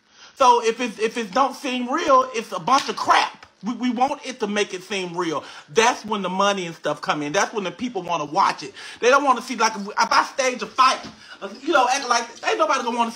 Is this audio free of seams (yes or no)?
yes